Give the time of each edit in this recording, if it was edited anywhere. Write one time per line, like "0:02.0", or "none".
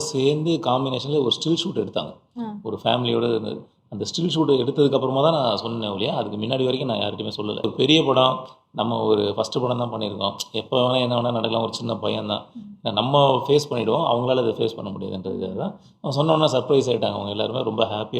0:07.6